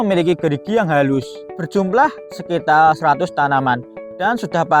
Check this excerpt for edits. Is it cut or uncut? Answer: cut